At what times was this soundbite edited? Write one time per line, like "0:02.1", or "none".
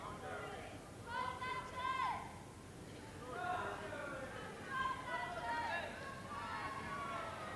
0:05.4